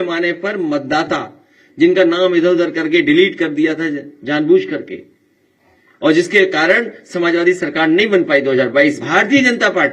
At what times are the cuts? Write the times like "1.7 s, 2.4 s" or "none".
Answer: 9.0 s